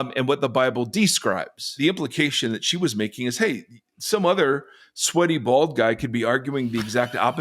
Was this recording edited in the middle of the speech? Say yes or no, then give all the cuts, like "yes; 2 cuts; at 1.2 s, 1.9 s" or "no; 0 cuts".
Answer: yes; 1 cut; at 1.8 s